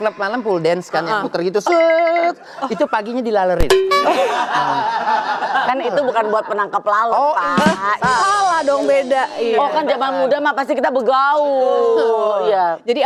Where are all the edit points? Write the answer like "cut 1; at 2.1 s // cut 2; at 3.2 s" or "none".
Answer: none

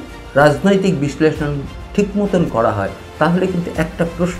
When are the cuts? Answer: none

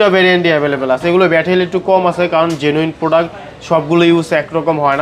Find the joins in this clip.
none

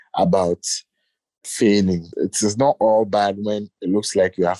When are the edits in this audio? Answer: none

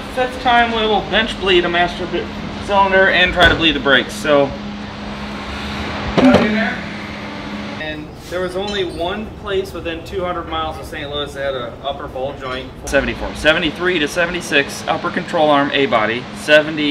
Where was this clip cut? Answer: cut 1; at 7.8 s // cut 2; at 12.9 s

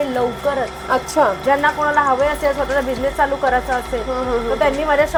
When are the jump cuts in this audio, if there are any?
none

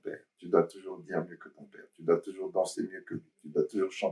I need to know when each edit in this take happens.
none

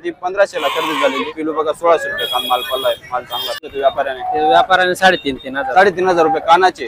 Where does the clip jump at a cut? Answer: cut 1; at 1.3 s // cut 2; at 3.7 s

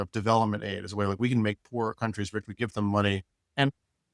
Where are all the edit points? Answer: none

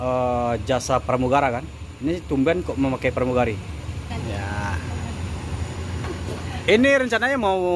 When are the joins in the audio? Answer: cut 1; at 4.1 s

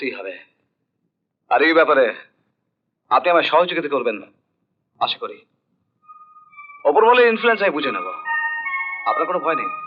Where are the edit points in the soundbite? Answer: none

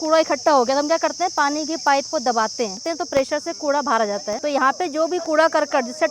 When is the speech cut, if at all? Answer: cut 1; at 2.8 s // cut 2; at 4.4 s

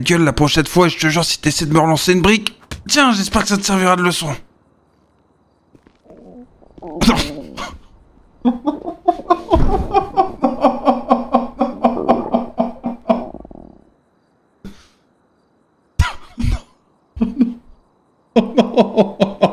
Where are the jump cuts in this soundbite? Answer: none

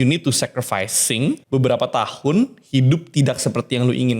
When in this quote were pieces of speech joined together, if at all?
cut 1; at 1.4 s

